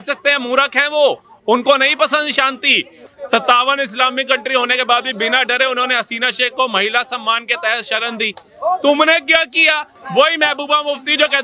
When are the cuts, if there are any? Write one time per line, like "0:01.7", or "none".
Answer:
0:03.0
0:09.9